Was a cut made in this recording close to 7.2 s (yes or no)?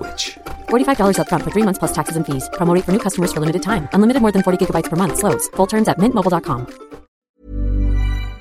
yes